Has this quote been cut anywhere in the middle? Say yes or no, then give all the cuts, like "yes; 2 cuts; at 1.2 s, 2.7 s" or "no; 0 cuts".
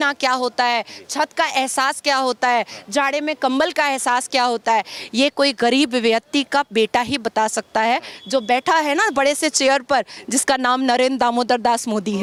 no; 0 cuts